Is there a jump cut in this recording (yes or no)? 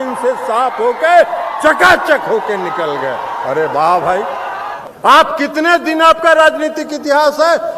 yes